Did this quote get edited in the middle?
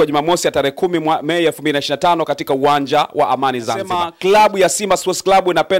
yes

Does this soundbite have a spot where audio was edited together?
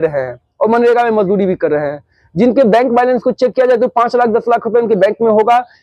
no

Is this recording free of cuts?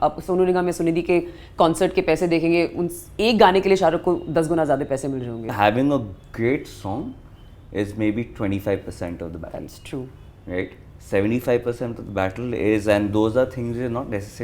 no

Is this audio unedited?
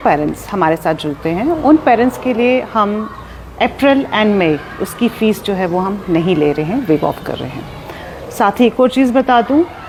yes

